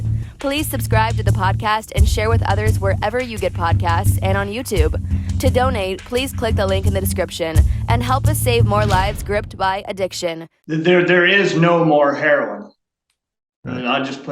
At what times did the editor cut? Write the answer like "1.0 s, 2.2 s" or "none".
10.5 s